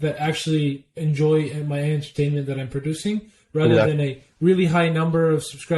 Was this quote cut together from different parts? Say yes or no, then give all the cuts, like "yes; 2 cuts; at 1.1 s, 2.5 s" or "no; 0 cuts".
no; 0 cuts